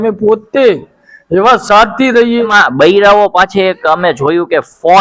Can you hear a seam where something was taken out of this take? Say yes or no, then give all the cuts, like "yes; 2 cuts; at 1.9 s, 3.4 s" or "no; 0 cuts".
yes; 1 cut; at 2.5 s